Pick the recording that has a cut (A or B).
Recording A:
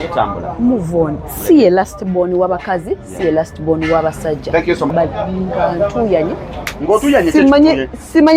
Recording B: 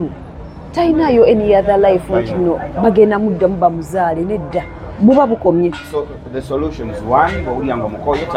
A